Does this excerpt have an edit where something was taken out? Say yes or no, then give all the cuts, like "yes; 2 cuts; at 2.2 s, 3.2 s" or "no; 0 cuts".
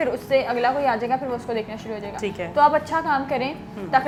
no; 0 cuts